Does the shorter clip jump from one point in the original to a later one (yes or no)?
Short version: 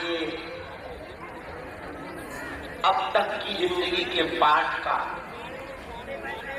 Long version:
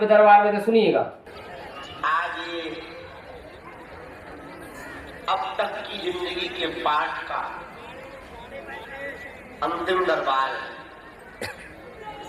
no